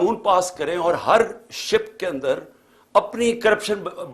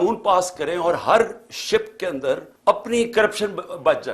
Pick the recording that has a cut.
second; 1 cut; at 2.5 s

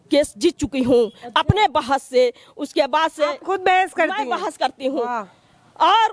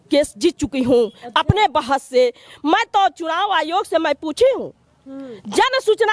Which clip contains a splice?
second; 1 cut; at 2.5 s

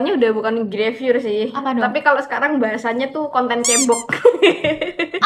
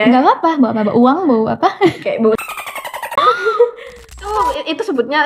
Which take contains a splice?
second; 1 cut; at 4.0 s

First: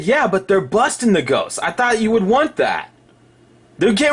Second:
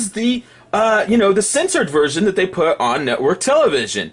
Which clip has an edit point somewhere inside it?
first; 1 cut; at 1.1 s

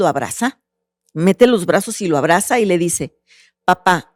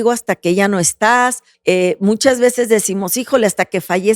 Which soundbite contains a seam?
second; 1 cut; at 1.5 s

